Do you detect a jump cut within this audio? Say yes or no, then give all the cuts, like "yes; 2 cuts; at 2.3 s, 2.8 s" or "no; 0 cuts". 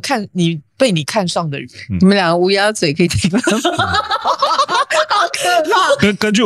no; 0 cuts